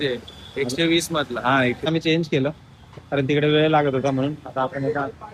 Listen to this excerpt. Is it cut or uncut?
cut